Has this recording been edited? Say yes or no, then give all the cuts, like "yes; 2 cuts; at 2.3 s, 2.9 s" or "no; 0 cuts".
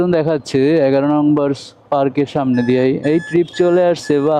no; 0 cuts